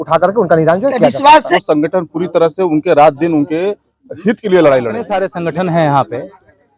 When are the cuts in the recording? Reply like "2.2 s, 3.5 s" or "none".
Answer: 1.5 s, 5.2 s